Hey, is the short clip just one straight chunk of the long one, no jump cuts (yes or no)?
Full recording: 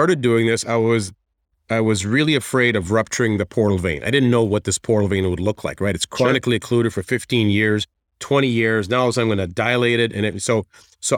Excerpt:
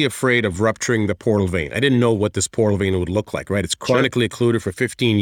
yes